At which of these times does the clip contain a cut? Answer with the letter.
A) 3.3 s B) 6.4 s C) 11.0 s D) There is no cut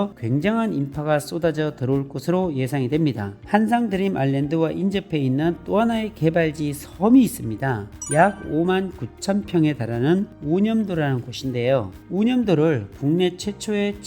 A